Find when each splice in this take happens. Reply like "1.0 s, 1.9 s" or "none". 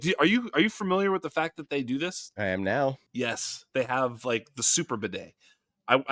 2.3 s, 3.0 s